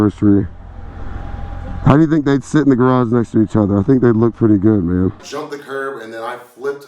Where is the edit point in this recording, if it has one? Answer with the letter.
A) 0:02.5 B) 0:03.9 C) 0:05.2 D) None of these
C